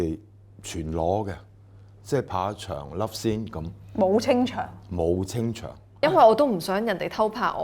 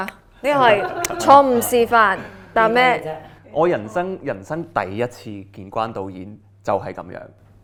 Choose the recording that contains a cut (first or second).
first